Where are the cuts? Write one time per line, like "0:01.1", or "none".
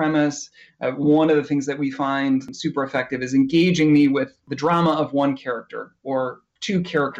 0:02.5
0:04.4